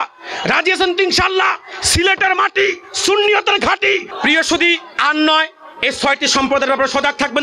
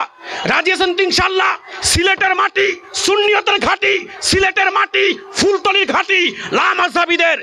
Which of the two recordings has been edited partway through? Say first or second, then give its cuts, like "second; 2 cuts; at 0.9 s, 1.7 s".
first; 1 cut; at 4.1 s